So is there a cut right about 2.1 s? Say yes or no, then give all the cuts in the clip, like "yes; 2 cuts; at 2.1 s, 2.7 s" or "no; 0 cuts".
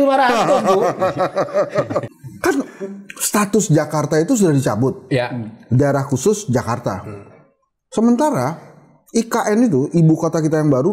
yes; 1 cut; at 2.1 s